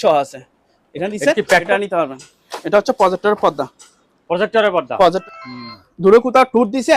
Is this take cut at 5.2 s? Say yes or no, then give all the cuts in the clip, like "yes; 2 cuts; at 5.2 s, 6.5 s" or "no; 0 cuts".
yes; 2 cuts; at 1.6 s, 5.2 s